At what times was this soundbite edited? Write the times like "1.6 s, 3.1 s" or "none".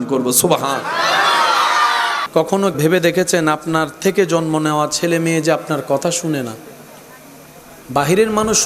2.2 s